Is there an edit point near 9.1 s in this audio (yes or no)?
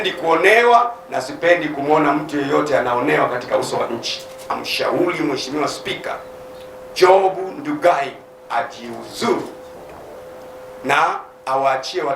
no